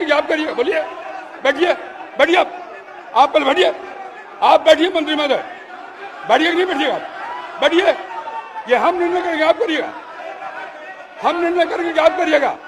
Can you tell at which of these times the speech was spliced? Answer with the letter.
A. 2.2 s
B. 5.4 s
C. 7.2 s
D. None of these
D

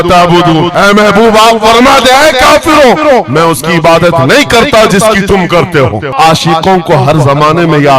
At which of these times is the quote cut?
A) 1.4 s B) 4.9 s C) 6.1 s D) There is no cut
C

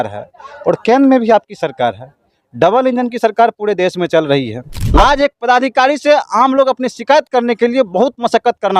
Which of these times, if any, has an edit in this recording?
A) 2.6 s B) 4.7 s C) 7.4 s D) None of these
B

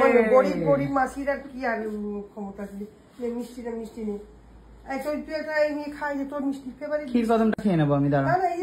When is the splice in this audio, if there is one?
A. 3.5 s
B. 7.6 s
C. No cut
C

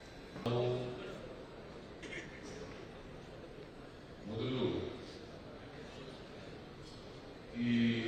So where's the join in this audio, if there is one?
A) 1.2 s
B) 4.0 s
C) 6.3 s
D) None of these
D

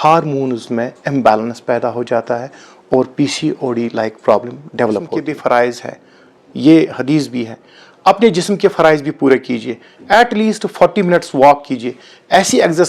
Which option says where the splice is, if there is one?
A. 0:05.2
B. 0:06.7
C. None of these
A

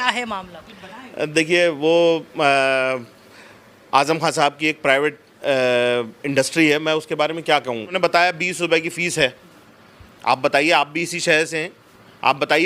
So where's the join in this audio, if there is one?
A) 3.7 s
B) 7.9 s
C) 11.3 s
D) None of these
B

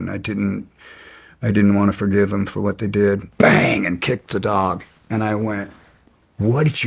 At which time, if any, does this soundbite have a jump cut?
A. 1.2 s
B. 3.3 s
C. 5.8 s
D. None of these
B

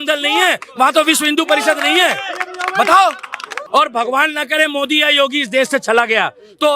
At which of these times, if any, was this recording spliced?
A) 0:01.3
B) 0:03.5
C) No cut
B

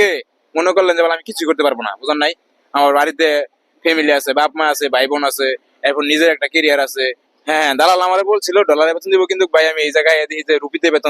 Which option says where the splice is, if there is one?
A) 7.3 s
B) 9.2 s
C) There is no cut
A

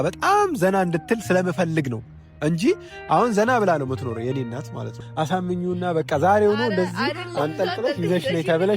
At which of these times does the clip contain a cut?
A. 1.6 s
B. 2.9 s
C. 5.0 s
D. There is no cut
C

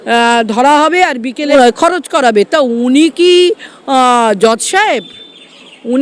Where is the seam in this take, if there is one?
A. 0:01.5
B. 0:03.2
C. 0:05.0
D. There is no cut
A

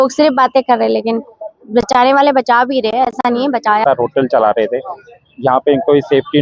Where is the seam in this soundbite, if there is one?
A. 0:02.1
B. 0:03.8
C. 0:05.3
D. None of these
B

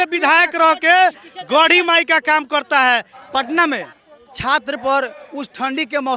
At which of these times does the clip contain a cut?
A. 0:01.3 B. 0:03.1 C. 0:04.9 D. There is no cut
B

